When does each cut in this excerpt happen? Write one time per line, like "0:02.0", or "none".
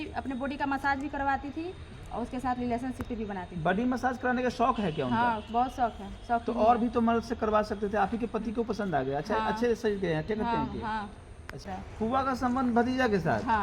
0:11.7